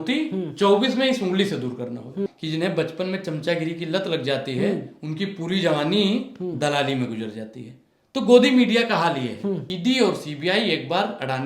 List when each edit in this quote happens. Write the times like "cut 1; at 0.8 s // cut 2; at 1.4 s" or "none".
cut 1; at 2.3 s // cut 2; at 9.7 s

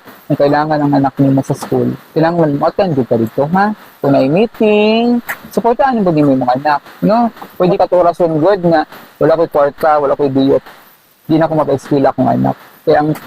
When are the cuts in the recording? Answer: cut 1; at 7.7 s

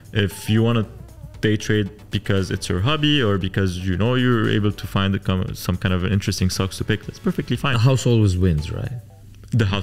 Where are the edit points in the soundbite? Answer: none

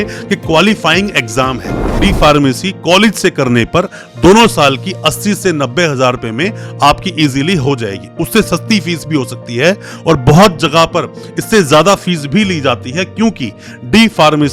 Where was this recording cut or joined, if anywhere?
cut 1; at 2.0 s

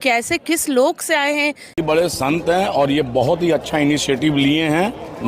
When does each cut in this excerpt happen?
cut 1; at 1.7 s

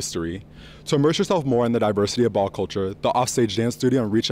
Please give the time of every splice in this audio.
none

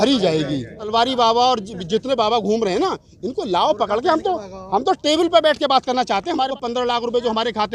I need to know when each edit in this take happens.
cut 1; at 0.9 s // cut 2; at 6.5 s

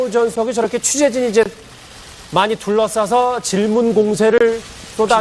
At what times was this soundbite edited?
cut 1; at 3.8 s

